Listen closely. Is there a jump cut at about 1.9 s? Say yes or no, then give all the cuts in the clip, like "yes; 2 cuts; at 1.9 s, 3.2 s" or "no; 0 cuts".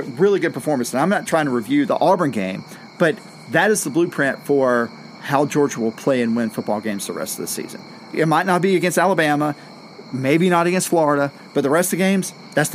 yes; 2 cuts; at 1.9 s, 8.1 s